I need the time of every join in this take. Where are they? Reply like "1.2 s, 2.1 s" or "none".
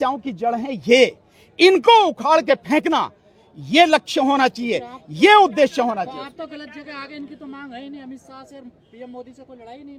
none